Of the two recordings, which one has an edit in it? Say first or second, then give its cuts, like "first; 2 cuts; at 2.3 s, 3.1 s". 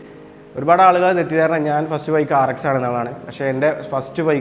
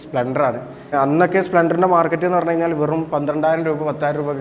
second; 1 cut; at 0.9 s